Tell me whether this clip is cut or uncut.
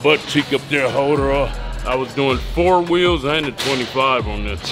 cut